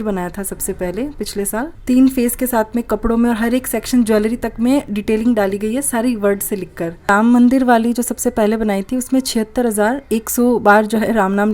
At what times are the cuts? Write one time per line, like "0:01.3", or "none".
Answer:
0:01.7
0:07.1